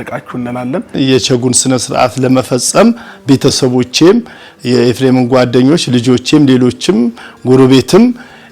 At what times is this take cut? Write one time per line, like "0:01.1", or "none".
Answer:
0:00.9